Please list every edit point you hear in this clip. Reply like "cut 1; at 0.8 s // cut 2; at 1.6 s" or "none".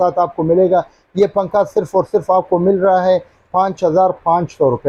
none